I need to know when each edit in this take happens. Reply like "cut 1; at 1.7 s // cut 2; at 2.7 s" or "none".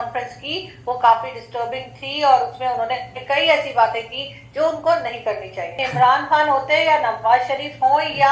cut 1; at 5.8 s